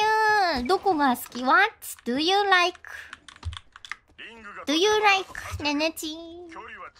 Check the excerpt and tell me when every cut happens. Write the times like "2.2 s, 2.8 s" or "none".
none